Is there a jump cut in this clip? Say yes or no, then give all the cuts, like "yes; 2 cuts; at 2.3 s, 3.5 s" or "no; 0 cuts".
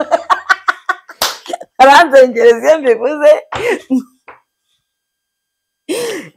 no; 0 cuts